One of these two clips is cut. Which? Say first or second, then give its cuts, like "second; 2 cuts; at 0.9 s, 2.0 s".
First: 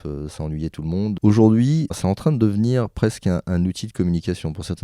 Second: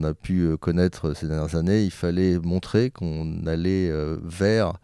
first; 2 cuts; at 1.2 s, 2.0 s